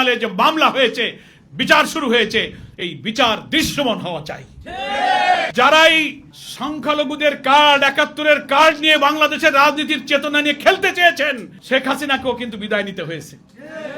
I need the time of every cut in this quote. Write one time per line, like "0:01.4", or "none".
0:05.5